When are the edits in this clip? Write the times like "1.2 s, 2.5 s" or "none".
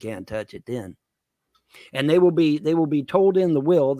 none